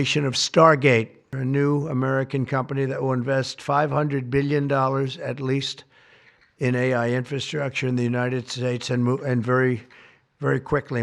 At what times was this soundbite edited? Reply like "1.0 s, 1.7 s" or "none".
1.4 s